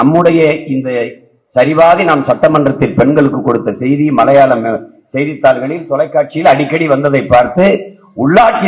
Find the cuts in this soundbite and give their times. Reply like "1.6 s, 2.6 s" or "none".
none